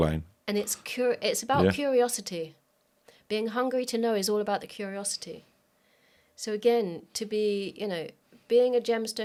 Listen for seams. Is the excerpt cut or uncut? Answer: uncut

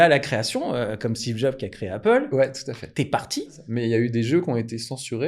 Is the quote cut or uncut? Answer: cut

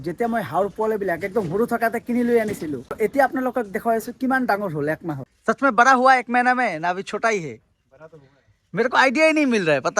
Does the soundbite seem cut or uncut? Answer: cut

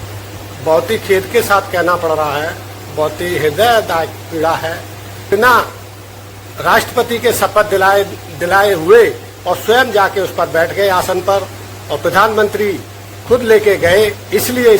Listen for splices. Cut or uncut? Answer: cut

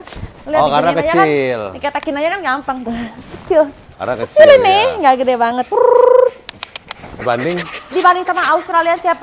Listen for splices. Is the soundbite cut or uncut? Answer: cut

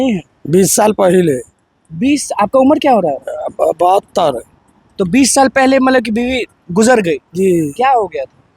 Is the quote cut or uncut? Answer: uncut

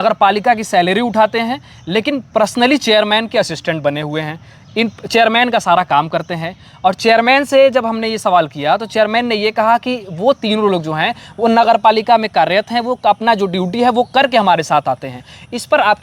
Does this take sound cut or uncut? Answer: uncut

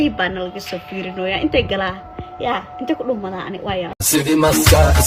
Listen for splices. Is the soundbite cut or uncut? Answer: cut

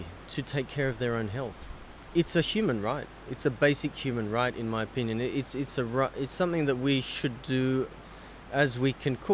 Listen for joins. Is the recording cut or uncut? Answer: cut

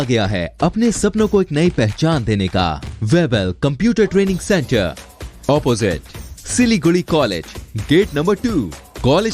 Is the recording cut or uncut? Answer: cut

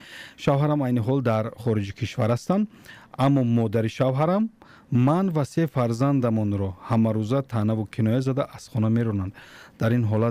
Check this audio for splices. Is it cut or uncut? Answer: uncut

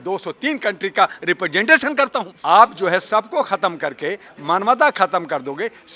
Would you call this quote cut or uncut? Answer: cut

